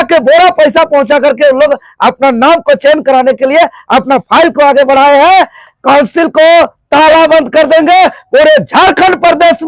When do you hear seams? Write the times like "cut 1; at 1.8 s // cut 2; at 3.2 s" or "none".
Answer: cut 1; at 5.6 s